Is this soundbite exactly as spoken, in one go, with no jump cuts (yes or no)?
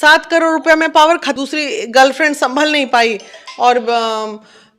no